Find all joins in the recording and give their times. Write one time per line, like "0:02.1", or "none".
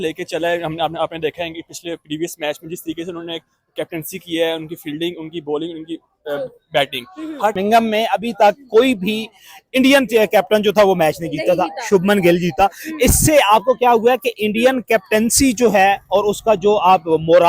0:07.6